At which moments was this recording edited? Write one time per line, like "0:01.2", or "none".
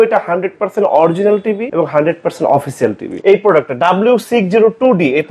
0:01.7
0:03.1